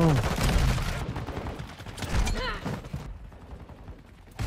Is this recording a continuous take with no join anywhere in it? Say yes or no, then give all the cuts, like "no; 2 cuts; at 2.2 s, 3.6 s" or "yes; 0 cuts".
no; 2 cuts; at 0.9 s, 3.1 s